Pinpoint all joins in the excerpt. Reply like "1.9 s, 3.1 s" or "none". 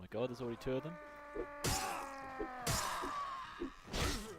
3.1 s